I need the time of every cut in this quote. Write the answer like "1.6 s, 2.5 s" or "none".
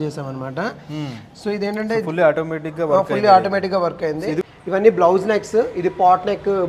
4.4 s